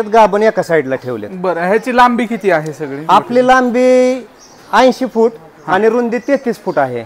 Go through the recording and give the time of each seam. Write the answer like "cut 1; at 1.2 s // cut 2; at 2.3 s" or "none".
none